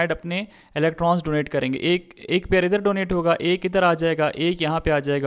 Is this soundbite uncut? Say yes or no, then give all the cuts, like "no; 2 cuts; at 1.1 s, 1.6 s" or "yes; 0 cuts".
yes; 0 cuts